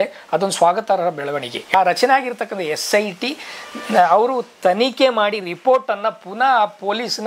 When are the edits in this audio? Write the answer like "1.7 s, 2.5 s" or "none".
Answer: 1.7 s